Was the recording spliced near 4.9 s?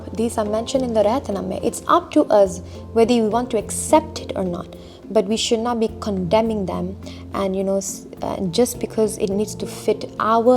no; 0 cuts

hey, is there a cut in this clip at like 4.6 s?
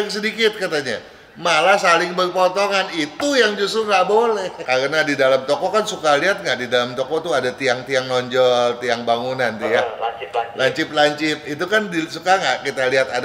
yes; 1 cut; at 4.6 s

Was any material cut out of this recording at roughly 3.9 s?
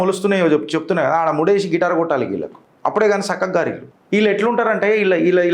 yes; 1 cut; at 3.9 s

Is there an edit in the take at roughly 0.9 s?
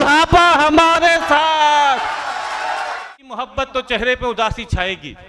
no; 1 cut; at 3.3 s

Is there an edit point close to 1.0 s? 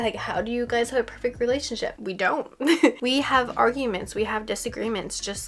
no; 1 cut; at 3.0 s

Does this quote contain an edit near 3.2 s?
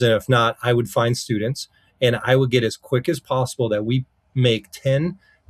no; 0 cuts

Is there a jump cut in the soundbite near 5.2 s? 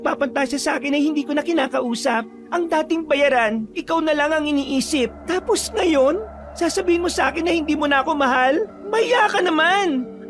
yes; 4 cuts; at 2.4 s, 3.7 s, 5.2 s, 8.8 s

